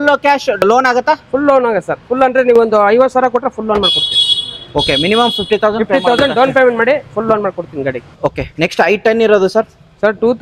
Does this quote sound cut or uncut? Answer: uncut